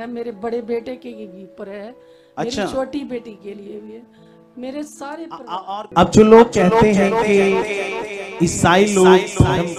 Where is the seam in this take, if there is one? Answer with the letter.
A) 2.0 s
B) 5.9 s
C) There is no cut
B